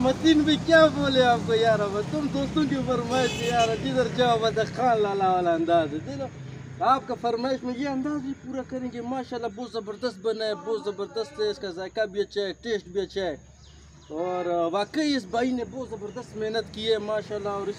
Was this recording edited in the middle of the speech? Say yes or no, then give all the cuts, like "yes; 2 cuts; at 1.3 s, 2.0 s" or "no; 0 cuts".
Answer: no; 0 cuts